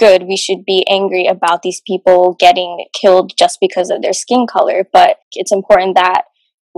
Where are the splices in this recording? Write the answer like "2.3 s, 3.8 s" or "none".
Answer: 5.3 s